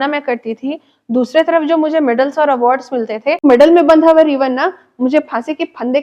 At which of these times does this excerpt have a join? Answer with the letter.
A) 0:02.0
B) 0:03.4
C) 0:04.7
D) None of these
B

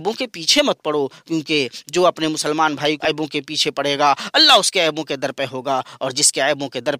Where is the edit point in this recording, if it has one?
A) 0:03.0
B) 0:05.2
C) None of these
A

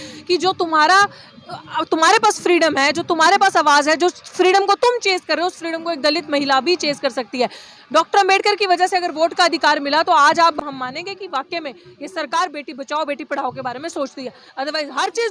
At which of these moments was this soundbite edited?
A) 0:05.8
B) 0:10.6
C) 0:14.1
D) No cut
B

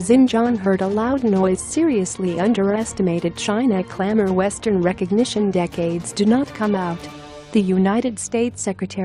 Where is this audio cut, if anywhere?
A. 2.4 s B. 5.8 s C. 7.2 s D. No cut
C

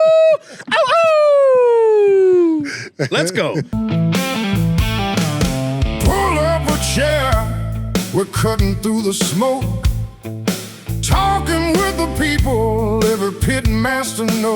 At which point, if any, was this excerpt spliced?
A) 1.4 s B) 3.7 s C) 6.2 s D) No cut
B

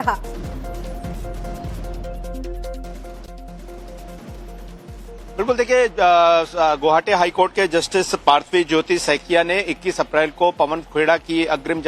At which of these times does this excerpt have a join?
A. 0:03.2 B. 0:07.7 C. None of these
C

